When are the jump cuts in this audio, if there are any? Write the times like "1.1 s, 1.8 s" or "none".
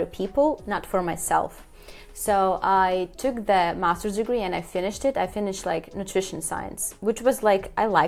none